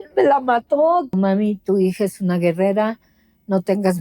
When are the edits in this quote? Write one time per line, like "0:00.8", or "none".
0:01.1